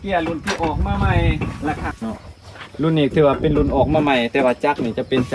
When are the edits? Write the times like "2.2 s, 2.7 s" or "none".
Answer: 1.9 s